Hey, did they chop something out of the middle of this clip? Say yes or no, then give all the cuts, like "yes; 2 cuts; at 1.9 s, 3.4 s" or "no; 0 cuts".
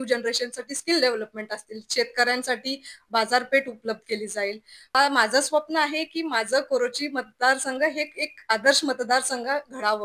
yes; 1 cut; at 4.9 s